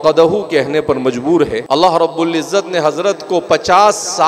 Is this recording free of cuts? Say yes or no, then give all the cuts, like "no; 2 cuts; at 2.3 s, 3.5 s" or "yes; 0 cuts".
no; 1 cut; at 1.6 s